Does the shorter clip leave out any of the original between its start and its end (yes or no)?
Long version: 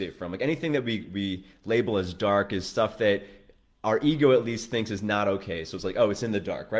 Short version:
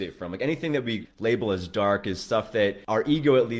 yes